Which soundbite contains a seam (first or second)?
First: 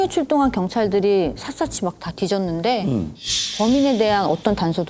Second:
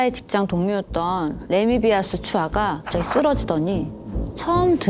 second